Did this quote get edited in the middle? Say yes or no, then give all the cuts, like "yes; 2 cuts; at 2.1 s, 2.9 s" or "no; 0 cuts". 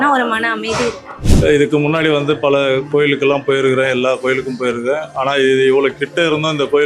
yes; 1 cut; at 1.2 s